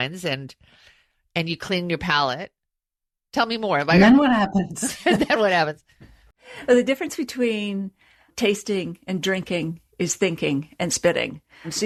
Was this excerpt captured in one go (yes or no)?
yes